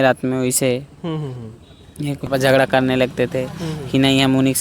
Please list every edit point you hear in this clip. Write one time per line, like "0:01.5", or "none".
0:02.3